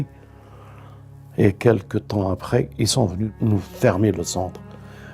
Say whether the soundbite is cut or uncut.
cut